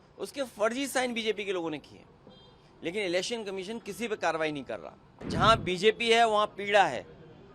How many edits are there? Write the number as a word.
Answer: one